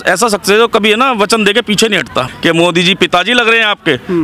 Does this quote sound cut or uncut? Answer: cut